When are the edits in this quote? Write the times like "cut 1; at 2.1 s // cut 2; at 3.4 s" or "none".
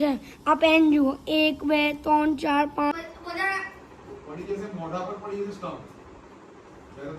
cut 1; at 2.9 s

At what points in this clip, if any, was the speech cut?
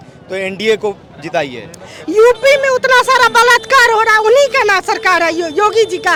none

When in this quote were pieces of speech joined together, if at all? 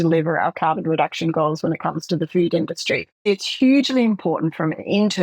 cut 1; at 3.2 s

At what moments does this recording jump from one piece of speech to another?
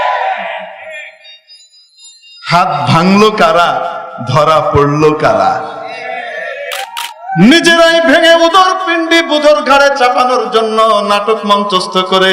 cut 1; at 6.9 s

